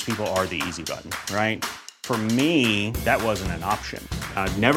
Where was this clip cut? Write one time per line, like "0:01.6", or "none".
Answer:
none